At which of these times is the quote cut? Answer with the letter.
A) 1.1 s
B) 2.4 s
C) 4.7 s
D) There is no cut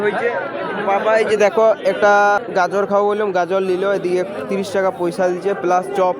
B